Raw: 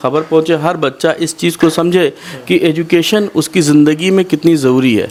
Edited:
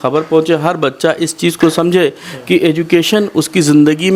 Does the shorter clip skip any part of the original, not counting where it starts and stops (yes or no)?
no